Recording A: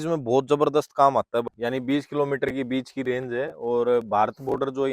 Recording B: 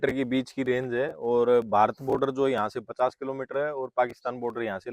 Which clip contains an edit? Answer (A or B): A